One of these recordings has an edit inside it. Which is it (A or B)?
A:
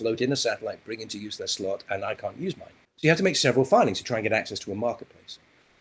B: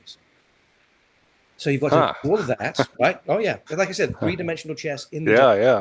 A